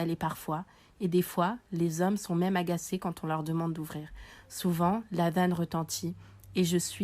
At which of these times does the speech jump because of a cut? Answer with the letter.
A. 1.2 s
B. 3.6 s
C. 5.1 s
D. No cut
D